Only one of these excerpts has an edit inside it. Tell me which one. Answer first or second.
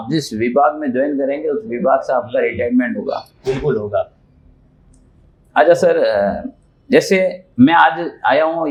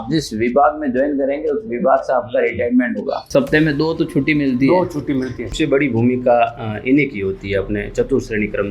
second